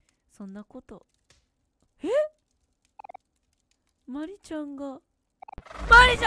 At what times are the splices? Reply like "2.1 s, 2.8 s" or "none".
none